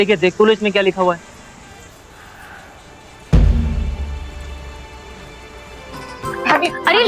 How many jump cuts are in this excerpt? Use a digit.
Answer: 1